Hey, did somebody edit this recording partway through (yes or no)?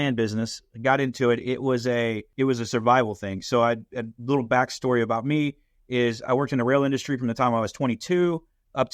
yes